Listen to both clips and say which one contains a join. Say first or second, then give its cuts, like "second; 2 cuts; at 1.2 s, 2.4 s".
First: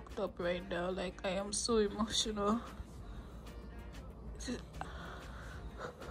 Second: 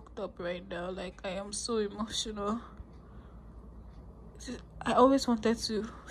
first; 1 cut; at 4.7 s